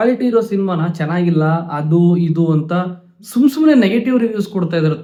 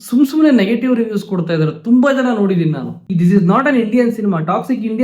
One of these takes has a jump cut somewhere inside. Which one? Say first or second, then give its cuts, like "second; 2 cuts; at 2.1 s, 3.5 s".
second; 1 cut; at 3.0 s